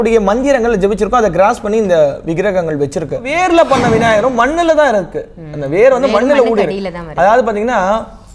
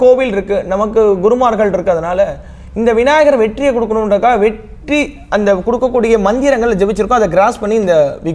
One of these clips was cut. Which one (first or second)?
first